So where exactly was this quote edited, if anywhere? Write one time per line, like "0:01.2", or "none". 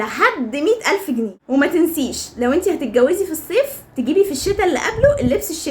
0:01.4